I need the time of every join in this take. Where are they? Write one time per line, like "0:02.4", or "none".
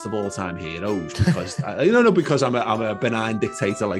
0:03.0